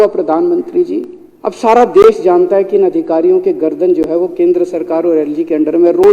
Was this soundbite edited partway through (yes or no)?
yes